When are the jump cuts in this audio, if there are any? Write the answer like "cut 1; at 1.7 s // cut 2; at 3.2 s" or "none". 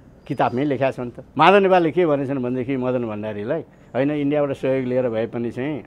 cut 1; at 1.2 s